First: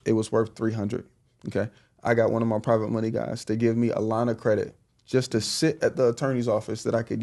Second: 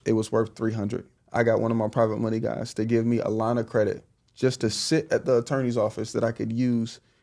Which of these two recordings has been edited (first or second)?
second